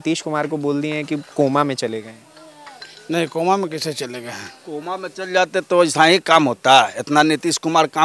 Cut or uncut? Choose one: uncut